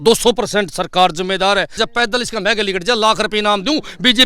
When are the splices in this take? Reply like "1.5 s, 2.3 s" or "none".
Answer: 1.8 s